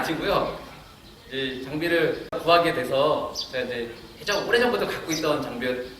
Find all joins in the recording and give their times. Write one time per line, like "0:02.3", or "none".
0:02.4

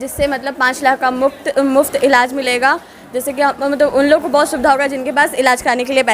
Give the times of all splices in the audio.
none

